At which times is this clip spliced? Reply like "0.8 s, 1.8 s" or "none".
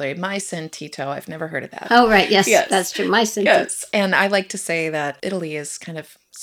5.2 s